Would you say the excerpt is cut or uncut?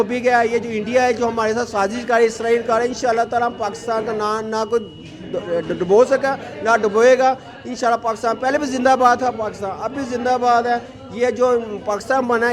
uncut